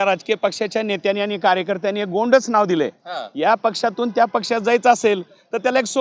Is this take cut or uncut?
uncut